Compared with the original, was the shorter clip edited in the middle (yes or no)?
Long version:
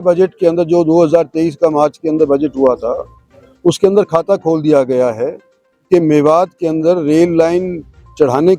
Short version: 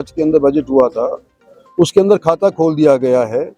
no